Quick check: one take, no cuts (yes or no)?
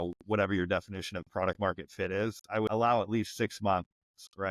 no